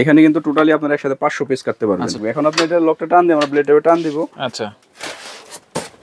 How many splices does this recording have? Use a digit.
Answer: 1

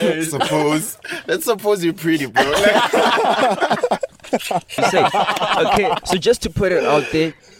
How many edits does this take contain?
1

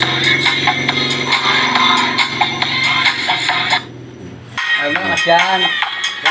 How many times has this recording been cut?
1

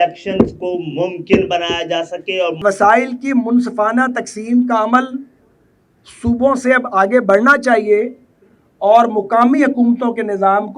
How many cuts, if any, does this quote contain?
1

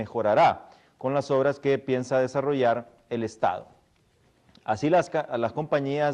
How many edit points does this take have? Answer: 1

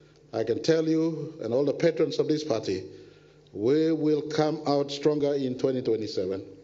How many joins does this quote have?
0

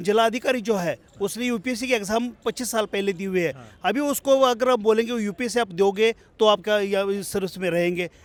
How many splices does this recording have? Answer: 0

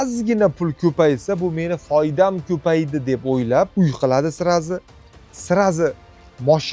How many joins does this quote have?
1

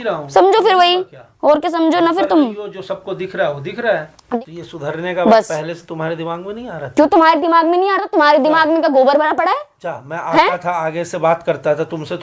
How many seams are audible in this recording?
1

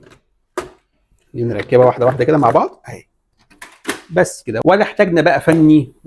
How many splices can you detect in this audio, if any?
0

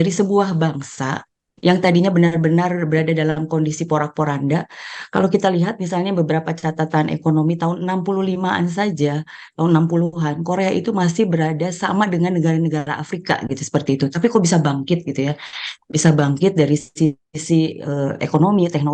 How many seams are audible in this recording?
0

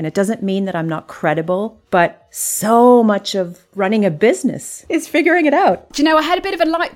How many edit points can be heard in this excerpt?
4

